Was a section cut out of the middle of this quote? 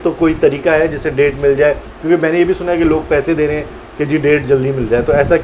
no; 0 cuts

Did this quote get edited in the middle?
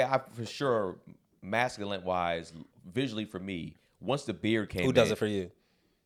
no; 0 cuts

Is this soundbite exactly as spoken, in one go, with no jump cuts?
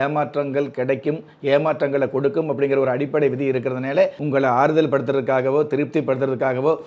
no; 1 cut; at 4.2 s

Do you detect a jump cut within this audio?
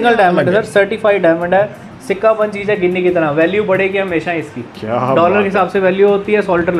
no; 0 cuts

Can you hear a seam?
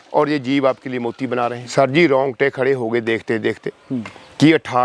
yes; 1 cut; at 1.6 s

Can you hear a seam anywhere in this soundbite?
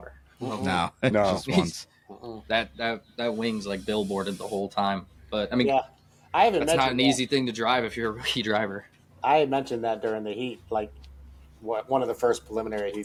no; 0 cuts

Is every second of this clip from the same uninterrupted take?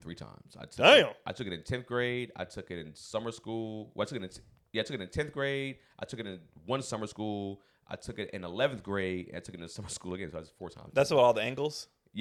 yes; 0 cuts

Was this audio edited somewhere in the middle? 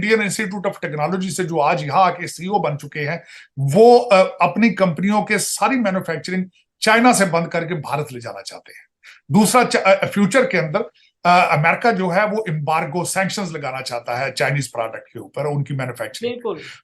no; 0 cuts

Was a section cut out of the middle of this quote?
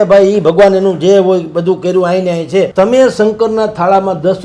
yes; 1 cut; at 2.7 s

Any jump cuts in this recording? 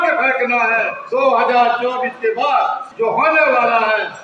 yes; 2 cuts; at 1.0 s, 2.8 s

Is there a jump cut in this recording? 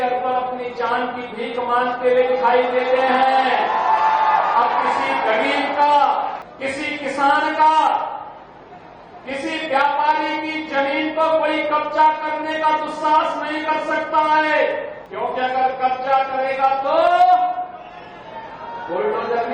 yes; 2 cuts; at 6.5 s, 15.0 s

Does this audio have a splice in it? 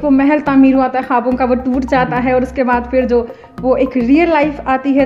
no; 0 cuts

